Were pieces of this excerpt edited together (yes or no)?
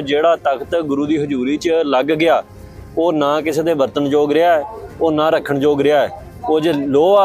no